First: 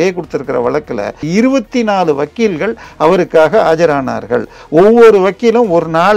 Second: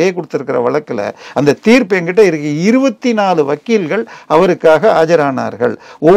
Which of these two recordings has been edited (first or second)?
first